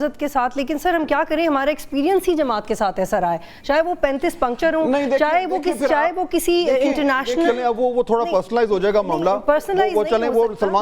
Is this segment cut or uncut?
uncut